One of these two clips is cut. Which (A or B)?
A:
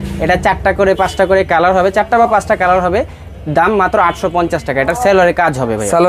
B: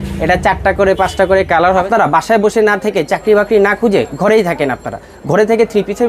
B